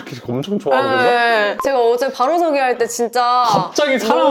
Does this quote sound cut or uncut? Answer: cut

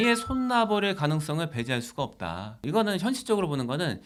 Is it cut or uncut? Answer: uncut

